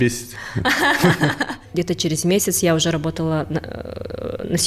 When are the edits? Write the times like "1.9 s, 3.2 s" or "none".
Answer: 1.7 s

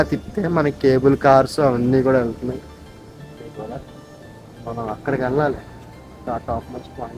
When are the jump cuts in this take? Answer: none

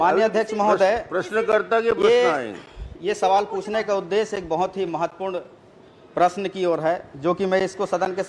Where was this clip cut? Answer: none

